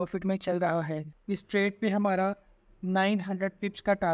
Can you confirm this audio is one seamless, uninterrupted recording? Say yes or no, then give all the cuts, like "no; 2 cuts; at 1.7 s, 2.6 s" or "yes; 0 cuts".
no; 1 cut; at 1.1 s